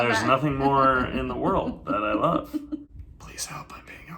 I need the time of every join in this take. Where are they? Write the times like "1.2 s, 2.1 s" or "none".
2.9 s